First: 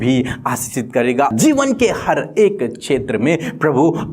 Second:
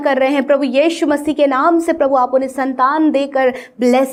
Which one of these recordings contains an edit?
first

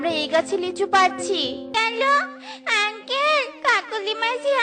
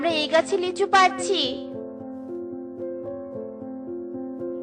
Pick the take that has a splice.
first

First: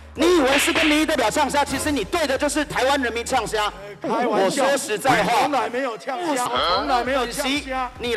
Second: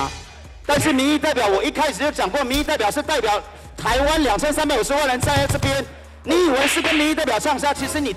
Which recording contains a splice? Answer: first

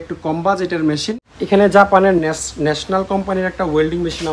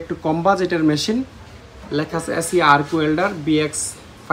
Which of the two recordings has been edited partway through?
first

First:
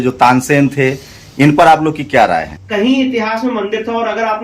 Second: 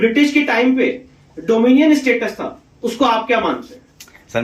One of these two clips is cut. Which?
first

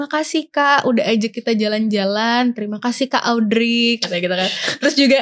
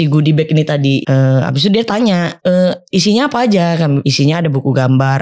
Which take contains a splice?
second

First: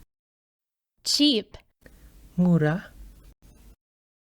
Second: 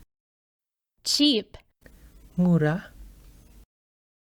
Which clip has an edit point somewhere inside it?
first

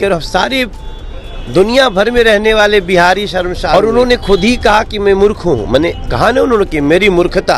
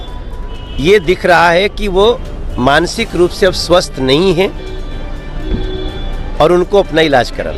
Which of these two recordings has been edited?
first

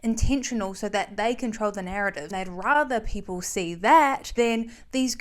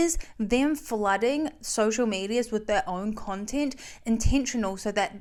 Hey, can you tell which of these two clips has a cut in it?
first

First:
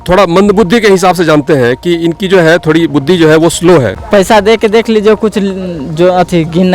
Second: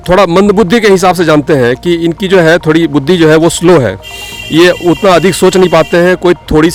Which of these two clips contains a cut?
first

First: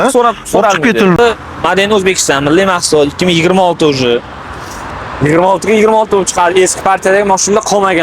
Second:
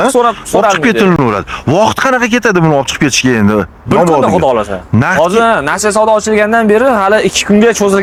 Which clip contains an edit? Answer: first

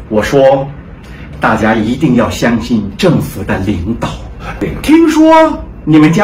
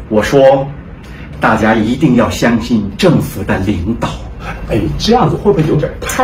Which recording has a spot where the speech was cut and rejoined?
first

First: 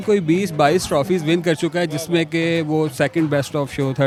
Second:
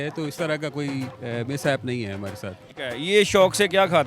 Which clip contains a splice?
second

